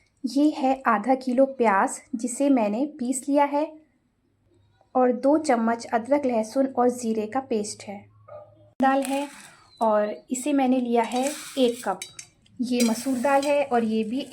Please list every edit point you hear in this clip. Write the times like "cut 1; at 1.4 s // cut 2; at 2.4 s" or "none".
cut 1; at 8.8 s